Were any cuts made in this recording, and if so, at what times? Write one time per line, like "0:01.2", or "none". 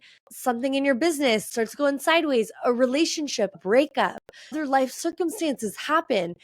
0:01.5
0:03.6